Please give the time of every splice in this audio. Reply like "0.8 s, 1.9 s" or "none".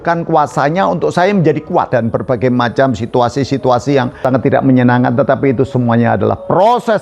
1.9 s, 4.1 s